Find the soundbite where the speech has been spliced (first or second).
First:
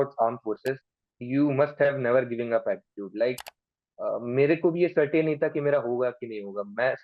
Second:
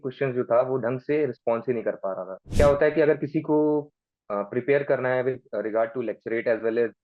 second